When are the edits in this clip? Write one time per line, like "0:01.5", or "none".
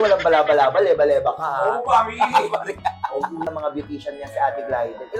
0:03.5